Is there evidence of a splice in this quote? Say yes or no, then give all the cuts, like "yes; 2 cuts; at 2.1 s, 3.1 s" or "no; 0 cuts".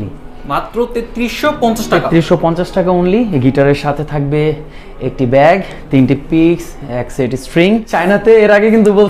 yes; 1 cut; at 7.9 s